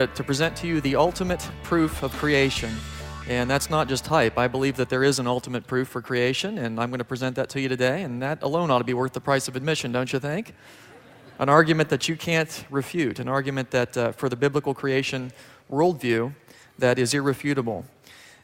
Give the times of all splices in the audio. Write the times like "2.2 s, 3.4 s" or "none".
1.0 s